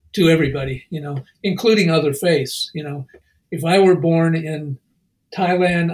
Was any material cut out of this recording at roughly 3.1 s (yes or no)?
yes